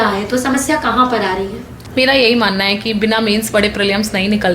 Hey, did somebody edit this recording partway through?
yes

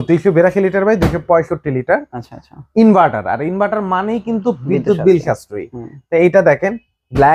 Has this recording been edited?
no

